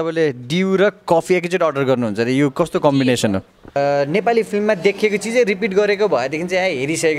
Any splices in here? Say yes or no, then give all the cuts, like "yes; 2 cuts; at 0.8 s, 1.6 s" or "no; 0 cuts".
yes; 1 cut; at 3.8 s